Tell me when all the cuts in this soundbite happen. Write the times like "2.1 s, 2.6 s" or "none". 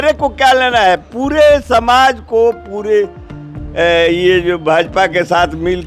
none